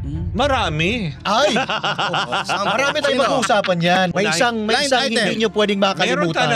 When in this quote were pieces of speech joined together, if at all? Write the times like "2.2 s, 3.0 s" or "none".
4.1 s